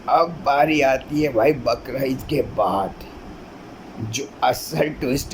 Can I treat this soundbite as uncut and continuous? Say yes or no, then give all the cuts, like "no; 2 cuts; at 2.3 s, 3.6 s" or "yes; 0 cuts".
yes; 0 cuts